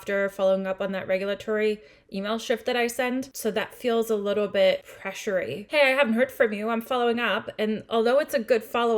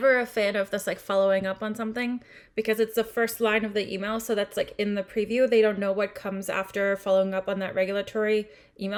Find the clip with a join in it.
first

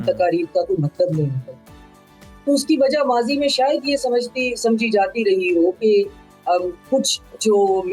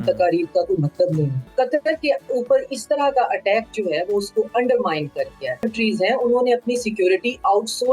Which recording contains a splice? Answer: second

